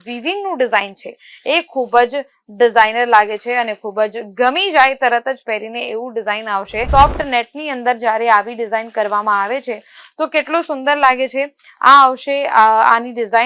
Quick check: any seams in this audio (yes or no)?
yes